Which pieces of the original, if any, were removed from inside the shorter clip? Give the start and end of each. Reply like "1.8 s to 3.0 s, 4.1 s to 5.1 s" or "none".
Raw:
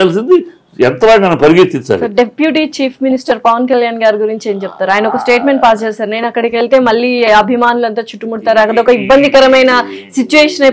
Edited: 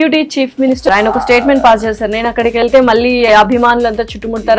3.3 s to 4.9 s

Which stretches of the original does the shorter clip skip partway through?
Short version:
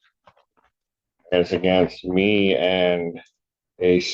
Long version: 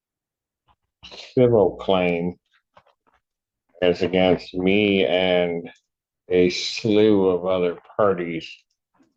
none

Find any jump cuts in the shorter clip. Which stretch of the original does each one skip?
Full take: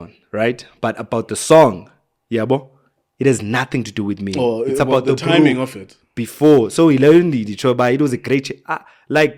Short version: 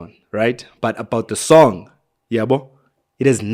none

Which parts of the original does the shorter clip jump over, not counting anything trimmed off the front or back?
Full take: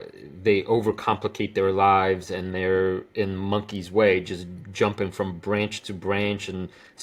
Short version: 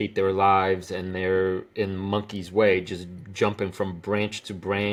none

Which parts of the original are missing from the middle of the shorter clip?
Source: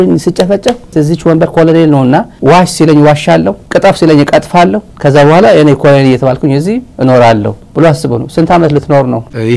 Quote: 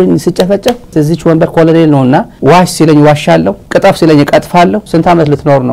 4.8 s to 8.3 s

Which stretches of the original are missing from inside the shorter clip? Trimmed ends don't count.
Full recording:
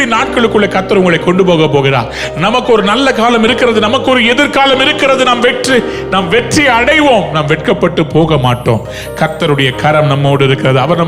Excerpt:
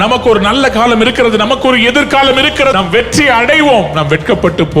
5.2 s to 6.1 s

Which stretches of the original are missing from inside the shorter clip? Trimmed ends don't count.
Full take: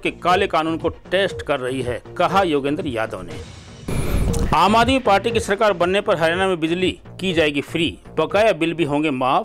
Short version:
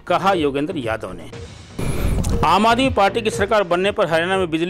none

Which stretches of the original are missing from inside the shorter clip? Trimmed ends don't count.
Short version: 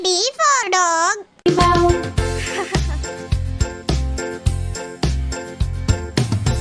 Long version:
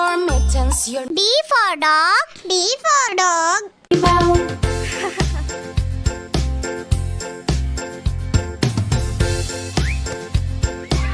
none

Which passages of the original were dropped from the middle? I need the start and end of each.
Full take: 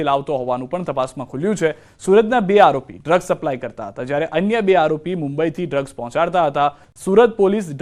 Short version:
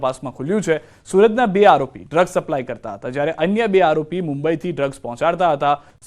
none

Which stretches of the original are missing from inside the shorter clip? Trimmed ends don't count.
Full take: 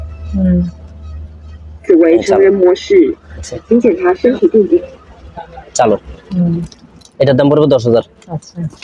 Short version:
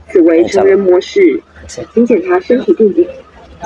none

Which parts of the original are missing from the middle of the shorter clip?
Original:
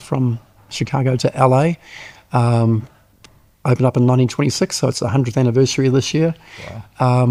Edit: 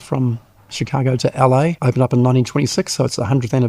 1.8 s to 3.6 s

